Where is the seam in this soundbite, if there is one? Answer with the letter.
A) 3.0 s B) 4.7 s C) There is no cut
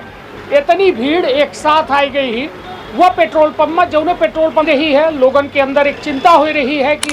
B